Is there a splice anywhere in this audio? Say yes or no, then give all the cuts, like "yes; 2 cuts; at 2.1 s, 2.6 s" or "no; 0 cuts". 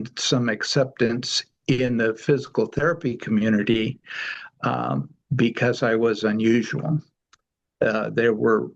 no; 0 cuts